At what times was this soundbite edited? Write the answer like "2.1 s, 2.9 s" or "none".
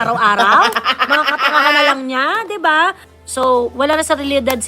3.1 s